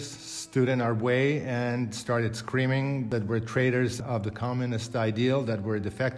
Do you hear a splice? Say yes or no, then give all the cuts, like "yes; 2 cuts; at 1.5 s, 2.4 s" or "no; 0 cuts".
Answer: yes; 2 cuts; at 3.1 s, 4.0 s